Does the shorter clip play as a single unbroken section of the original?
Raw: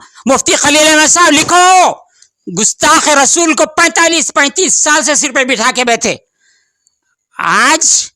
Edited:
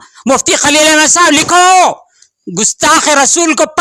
yes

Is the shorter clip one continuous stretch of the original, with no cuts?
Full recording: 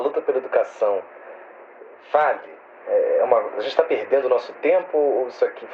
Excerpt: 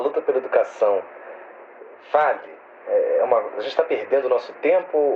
yes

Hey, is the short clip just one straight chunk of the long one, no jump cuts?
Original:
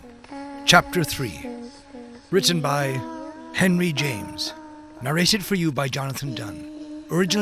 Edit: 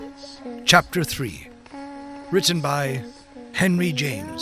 yes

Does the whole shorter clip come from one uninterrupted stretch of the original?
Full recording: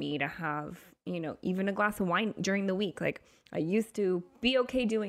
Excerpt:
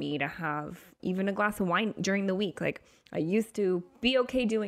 no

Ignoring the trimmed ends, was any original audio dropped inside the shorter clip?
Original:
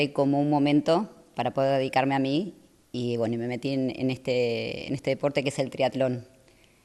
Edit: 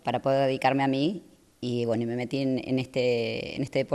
no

